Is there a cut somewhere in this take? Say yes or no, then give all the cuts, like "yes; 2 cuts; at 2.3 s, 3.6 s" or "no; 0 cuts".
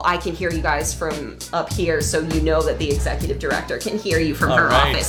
no; 0 cuts